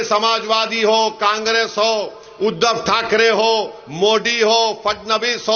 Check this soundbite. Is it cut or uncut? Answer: uncut